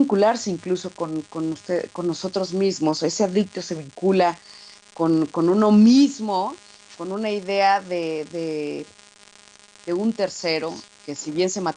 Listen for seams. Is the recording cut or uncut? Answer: uncut